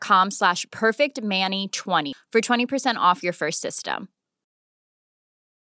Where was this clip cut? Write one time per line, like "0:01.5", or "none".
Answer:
0:02.1

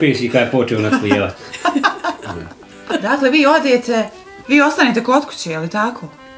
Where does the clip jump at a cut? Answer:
0:03.0

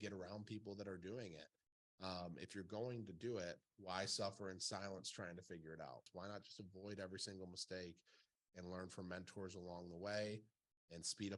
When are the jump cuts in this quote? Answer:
0:06.0

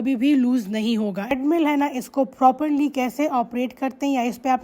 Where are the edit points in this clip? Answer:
0:01.3

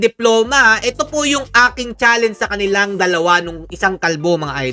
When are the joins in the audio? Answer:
none

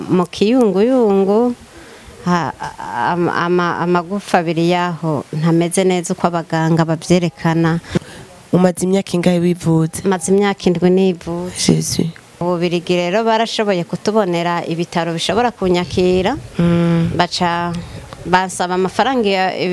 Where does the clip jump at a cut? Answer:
0:07.9
0:12.4

